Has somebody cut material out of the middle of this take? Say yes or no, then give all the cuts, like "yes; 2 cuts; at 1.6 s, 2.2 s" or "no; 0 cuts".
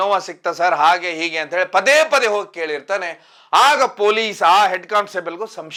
no; 0 cuts